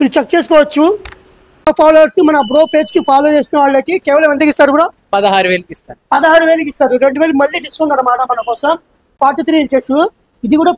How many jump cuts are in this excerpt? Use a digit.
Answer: 2